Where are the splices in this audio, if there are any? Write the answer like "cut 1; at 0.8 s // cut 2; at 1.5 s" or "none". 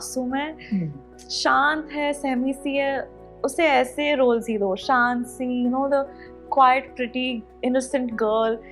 none